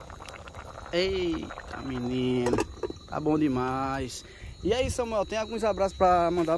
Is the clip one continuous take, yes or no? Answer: yes